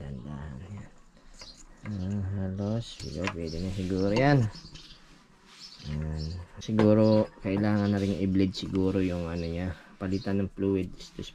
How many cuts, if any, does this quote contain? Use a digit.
1